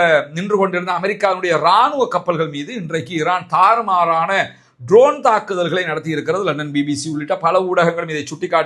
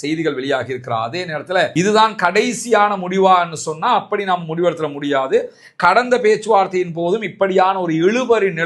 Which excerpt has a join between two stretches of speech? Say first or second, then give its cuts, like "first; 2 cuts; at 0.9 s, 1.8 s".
second; 1 cut; at 1.7 s